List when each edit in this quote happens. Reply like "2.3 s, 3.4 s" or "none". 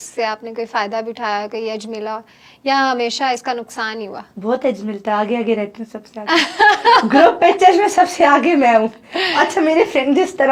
none